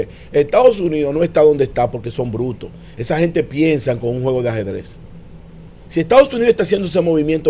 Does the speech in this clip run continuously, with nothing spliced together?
yes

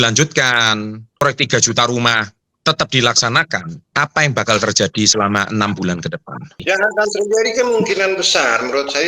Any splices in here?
yes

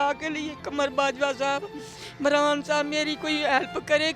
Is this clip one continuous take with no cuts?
yes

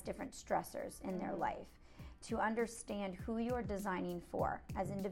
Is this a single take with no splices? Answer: yes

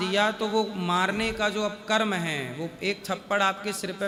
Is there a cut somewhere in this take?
no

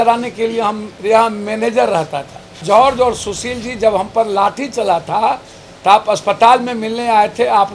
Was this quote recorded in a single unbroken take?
no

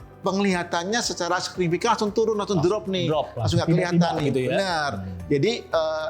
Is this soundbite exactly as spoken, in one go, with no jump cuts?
yes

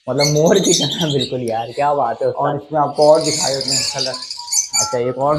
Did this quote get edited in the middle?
no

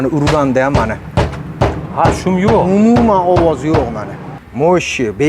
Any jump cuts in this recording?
yes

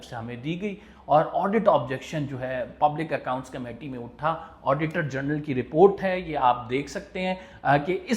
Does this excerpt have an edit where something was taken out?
no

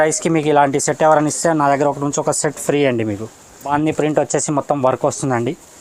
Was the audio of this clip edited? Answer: yes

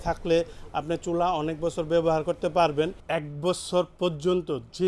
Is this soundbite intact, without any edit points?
no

